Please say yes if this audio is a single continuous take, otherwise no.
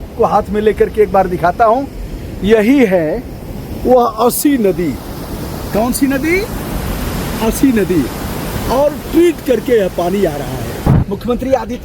no